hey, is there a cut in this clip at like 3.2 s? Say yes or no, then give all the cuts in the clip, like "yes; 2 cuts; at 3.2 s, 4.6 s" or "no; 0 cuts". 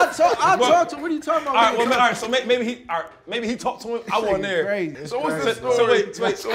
no; 0 cuts